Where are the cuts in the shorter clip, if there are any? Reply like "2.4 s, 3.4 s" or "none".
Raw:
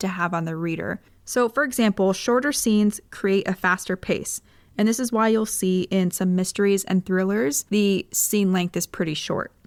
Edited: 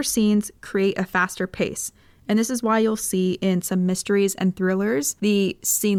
none